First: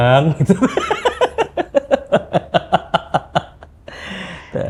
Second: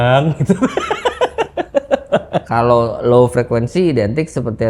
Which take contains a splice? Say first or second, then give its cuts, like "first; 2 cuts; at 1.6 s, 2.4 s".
second; 1 cut; at 2.4 s